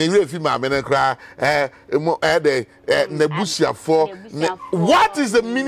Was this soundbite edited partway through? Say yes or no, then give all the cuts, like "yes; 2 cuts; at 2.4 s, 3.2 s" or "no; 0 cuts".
no; 0 cuts